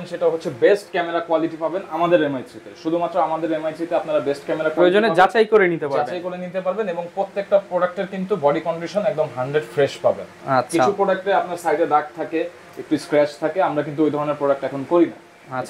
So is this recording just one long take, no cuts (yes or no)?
yes